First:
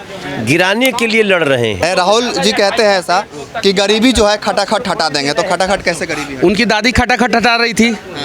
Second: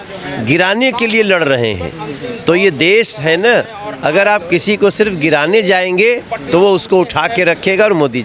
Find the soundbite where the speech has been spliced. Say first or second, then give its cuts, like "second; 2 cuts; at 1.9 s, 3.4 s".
first; 1 cut; at 1.8 s